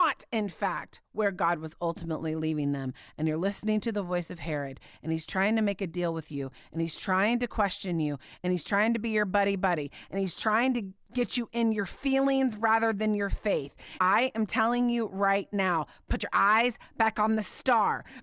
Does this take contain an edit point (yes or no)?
yes